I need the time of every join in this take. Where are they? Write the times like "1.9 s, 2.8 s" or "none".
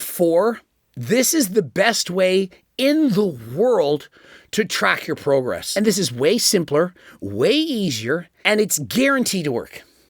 5.6 s, 8.3 s